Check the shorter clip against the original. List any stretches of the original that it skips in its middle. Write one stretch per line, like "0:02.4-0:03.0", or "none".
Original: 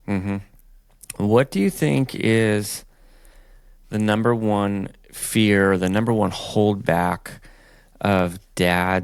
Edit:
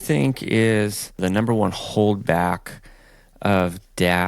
0:02.9-0:05.8